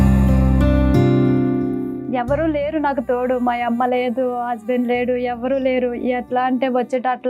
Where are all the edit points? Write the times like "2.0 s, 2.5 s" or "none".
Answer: 2.1 s